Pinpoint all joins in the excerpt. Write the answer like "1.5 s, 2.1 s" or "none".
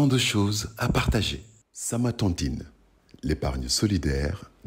1.7 s